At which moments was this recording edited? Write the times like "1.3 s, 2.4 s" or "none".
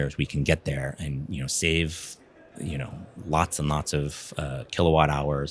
none